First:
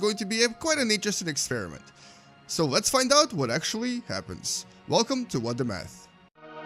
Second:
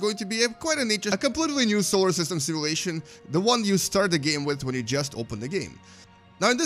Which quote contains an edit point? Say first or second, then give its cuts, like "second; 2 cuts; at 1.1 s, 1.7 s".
first; 1 cut; at 1.1 s